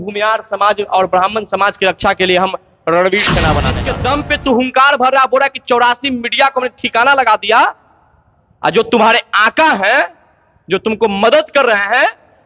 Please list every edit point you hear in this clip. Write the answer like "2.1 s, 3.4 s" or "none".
3.8 s